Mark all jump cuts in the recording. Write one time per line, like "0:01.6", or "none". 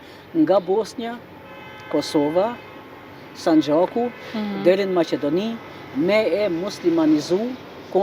none